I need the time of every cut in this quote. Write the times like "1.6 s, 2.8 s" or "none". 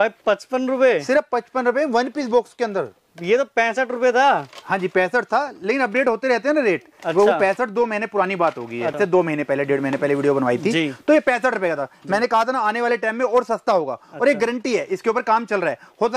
9.0 s